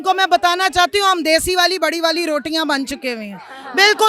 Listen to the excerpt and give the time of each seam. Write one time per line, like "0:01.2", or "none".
none